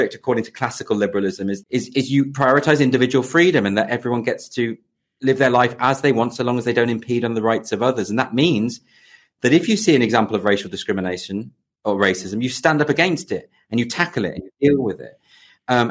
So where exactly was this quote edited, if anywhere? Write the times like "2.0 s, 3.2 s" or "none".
1.6 s